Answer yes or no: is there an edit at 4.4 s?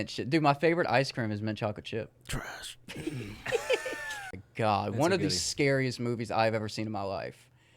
yes